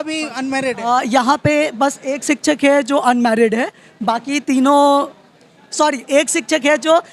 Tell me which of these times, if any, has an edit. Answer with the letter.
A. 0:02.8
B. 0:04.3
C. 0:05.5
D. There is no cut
D